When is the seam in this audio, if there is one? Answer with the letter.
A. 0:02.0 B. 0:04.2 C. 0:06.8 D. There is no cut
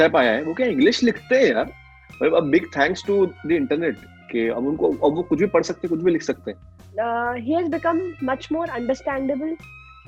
C